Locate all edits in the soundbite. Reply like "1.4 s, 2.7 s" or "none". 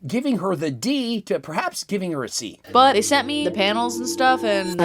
2.6 s